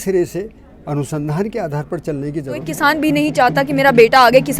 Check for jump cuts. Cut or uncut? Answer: cut